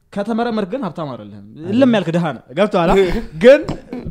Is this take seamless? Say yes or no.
yes